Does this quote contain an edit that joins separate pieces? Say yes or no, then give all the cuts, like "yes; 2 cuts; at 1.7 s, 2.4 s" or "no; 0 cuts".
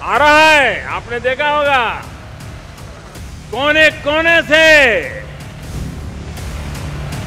no; 0 cuts